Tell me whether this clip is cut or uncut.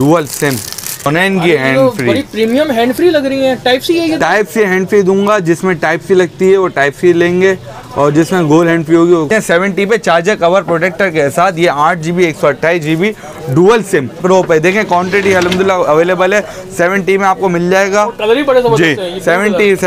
cut